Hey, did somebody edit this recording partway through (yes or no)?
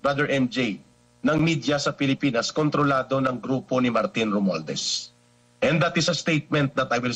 no